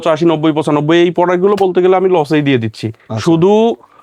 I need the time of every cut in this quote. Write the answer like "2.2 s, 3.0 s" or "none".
none